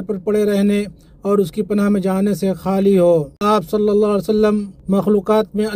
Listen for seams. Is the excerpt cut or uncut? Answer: cut